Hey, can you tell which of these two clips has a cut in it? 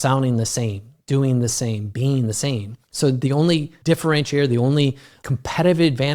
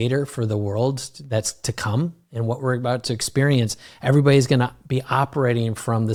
first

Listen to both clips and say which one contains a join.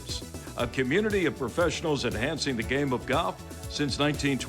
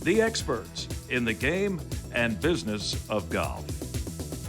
second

